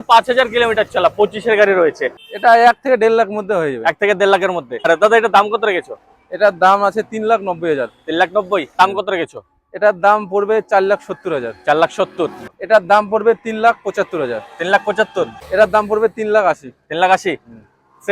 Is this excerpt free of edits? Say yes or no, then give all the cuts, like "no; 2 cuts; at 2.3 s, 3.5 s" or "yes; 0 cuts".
no; 5 cuts; at 2.2 s, 4.9 s, 8.8 s, 12.5 s, 15.4 s